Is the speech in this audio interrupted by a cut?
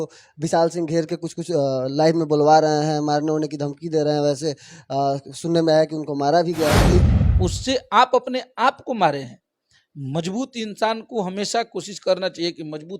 yes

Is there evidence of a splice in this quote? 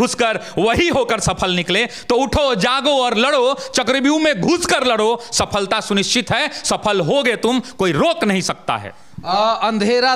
no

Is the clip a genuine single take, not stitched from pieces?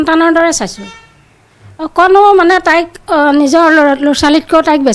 yes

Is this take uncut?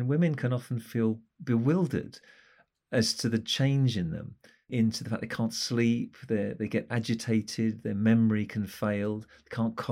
no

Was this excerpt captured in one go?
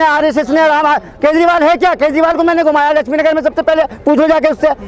yes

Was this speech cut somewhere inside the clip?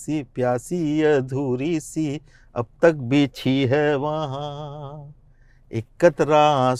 no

